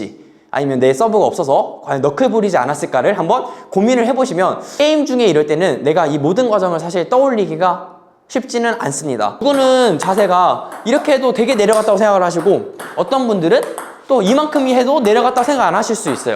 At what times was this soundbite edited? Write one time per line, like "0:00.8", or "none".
0:04.6
0:09.4